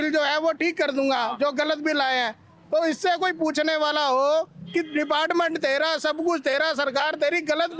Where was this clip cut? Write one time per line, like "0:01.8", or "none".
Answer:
none